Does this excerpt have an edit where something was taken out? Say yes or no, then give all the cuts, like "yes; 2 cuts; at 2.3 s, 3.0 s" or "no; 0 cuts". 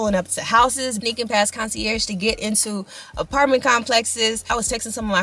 no; 0 cuts